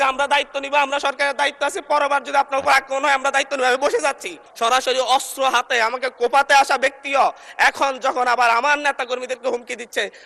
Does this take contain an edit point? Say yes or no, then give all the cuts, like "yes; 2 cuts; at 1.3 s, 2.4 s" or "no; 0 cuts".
yes; 1 cut; at 4.4 s